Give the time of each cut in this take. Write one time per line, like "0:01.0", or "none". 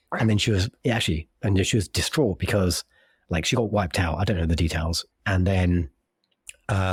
none